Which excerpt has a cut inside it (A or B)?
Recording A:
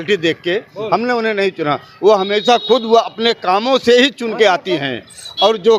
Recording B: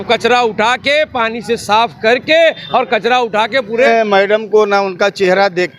B